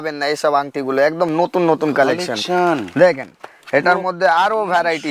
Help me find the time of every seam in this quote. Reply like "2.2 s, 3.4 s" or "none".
none

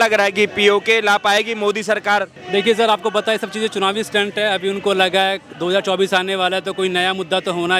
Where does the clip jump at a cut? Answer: 2.4 s

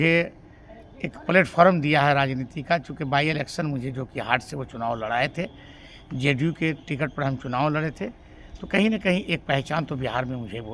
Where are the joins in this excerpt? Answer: none

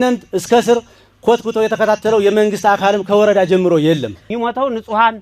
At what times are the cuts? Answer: 4.2 s

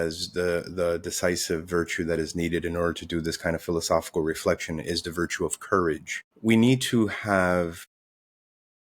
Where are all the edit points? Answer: none

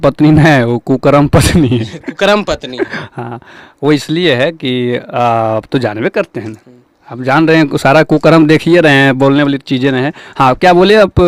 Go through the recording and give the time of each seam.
none

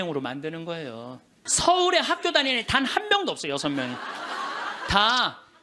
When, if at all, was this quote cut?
1.4 s

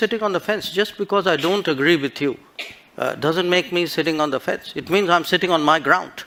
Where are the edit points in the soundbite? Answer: none

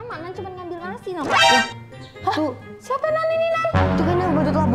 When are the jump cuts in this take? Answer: 1.3 s

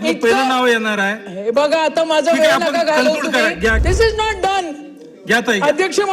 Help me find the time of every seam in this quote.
3.8 s

